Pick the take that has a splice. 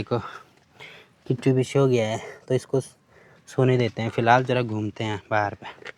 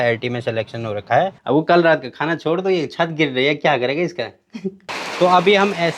second; 2 cuts; at 1.4 s, 4.8 s

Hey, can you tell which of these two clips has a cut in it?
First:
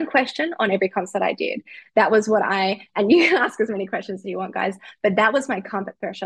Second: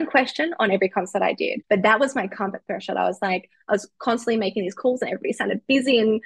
second; 1 cut; at 1.6 s

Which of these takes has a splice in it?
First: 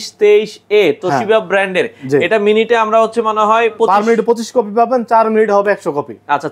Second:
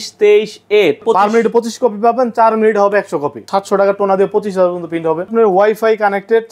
second; 3 cuts; at 1.0 s, 3.4 s, 5.3 s

